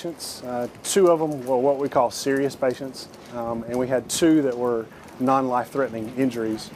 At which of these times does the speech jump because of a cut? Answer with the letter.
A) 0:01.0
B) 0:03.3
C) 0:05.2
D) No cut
D